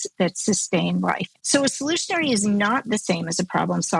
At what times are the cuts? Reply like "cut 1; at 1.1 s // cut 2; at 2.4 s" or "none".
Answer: cut 1; at 1.3 s